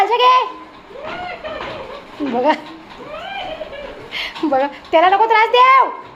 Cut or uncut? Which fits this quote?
uncut